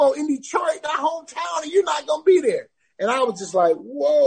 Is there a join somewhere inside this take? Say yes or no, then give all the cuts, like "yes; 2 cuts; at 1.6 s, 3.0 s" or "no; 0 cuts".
no; 0 cuts